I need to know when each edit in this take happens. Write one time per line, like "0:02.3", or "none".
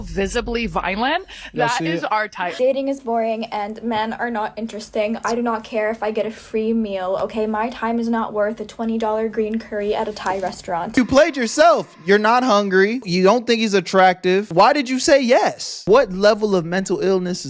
0:02.5
0:10.9
0:13.0
0:15.7